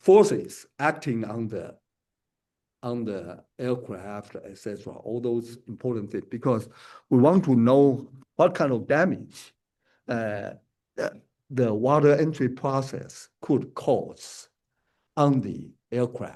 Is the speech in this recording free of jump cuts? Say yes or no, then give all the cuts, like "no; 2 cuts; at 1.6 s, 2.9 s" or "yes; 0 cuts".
yes; 0 cuts